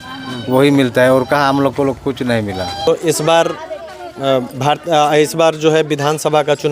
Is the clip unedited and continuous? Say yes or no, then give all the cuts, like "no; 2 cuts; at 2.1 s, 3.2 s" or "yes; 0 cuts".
no; 1 cut; at 2.9 s